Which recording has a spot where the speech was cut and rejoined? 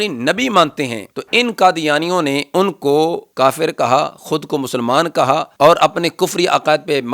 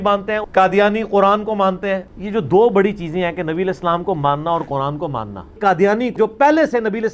first; 1 cut; at 3.3 s

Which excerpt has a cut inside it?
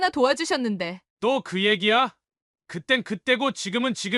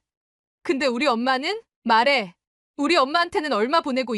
second; 1 cut; at 1.7 s

